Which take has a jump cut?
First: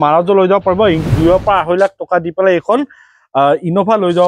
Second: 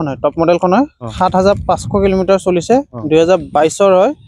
first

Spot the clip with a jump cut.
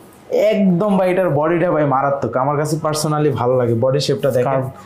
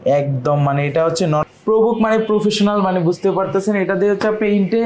second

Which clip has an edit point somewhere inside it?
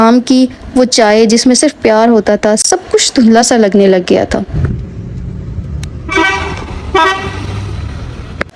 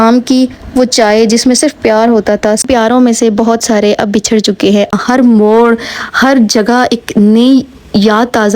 second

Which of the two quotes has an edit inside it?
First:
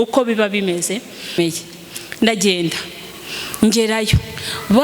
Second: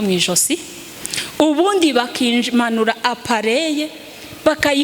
first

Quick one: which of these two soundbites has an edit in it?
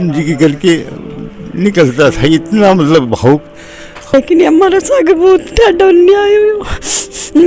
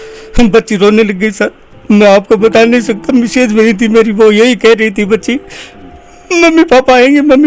first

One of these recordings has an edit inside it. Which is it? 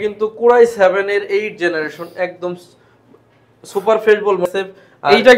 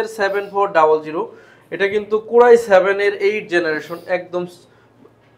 first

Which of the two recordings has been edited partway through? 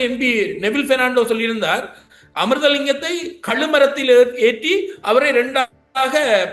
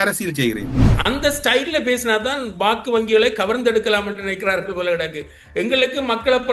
second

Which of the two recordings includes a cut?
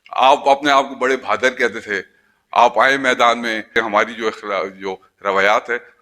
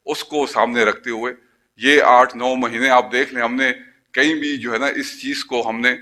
first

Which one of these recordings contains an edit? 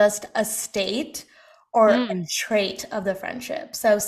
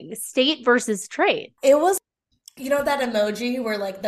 second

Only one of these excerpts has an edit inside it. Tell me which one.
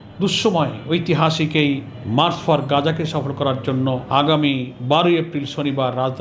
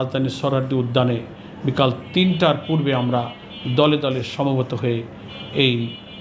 first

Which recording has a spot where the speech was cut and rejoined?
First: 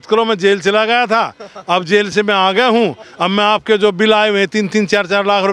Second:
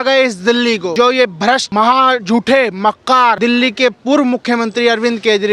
second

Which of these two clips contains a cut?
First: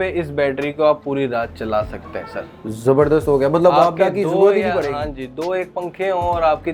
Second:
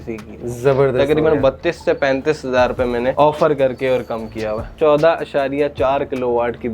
second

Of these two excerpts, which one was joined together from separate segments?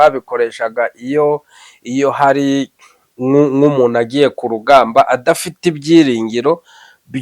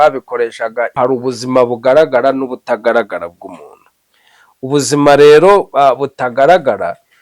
second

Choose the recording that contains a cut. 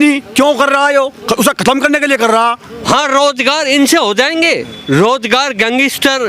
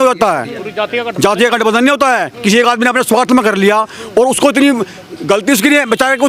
first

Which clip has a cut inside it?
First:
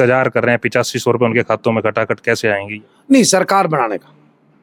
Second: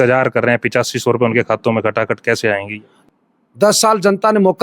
second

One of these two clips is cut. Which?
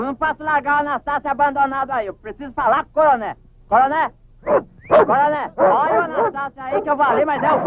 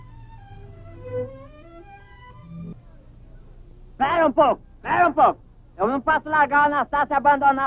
second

